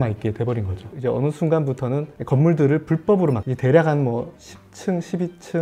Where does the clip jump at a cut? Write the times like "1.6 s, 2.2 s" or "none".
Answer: 0.9 s, 3.5 s

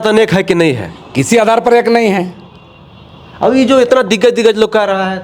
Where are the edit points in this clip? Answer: none

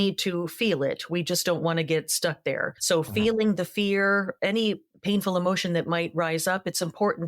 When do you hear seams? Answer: 2.7 s, 4.9 s

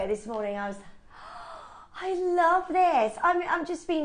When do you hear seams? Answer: none

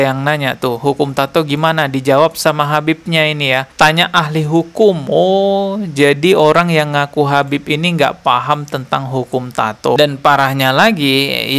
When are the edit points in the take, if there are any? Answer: 10.0 s

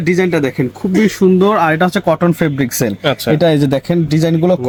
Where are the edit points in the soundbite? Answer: none

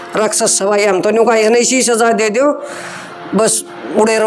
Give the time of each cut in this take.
none

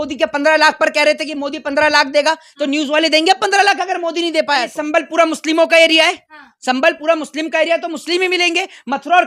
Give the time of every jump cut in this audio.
4.7 s

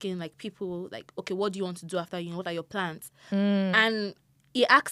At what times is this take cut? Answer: none

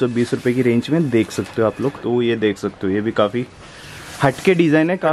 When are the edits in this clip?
2.0 s

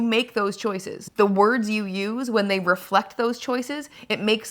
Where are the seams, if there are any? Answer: 1.0 s

